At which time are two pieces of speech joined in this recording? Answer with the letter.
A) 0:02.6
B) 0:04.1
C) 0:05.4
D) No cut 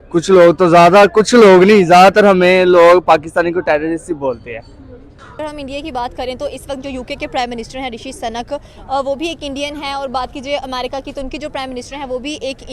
C